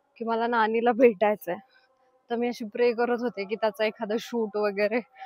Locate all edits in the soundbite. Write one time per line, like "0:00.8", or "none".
none